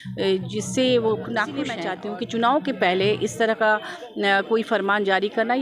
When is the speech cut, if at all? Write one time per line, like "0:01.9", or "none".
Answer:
0:01.9

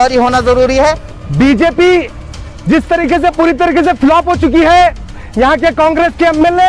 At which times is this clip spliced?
0:01.1

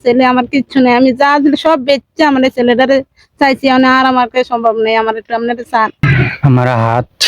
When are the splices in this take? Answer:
0:06.0

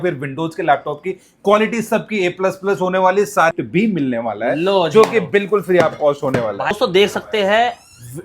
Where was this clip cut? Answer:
0:03.5
0:06.7

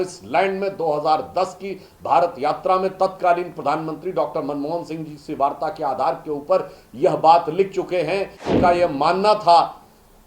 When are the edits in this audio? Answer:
0:08.4

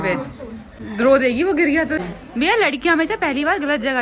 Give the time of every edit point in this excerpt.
0:02.0

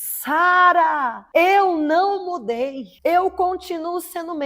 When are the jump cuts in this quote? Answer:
0:01.1
0:02.8

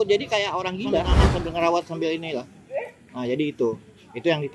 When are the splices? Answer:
0:01.1

